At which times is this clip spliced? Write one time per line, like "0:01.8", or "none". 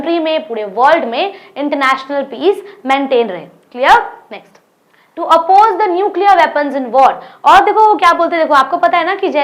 none